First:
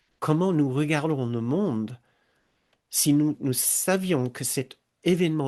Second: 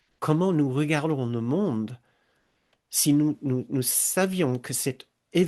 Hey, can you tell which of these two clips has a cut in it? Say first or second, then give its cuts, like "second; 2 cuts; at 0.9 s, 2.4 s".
first; 1 cut; at 3.4 s